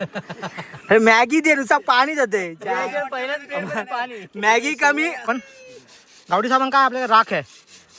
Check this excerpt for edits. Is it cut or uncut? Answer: cut